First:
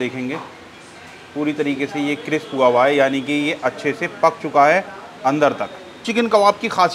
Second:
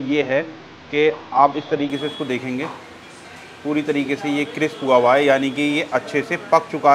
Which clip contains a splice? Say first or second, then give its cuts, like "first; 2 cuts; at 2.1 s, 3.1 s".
first; 1 cut; at 6.0 s